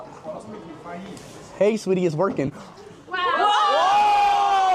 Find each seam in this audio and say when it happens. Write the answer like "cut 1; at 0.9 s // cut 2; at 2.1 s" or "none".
none